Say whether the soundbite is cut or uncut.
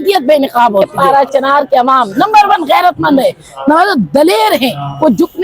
cut